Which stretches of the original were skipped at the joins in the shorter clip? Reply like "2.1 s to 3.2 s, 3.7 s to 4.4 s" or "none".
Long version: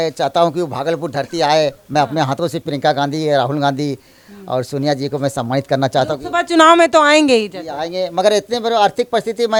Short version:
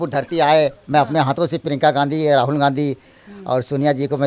none